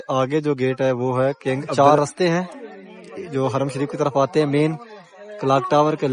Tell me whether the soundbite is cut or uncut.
cut